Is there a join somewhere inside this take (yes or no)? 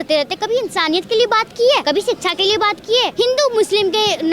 yes